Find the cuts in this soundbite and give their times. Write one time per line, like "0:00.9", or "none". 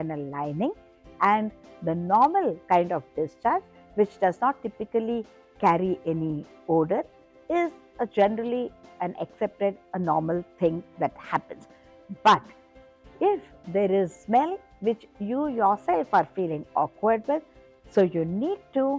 0:17.6